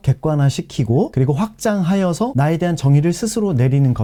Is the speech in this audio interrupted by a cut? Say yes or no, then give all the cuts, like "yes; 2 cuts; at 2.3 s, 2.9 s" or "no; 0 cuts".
no; 0 cuts